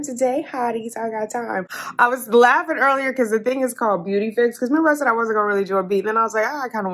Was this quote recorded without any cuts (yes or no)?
yes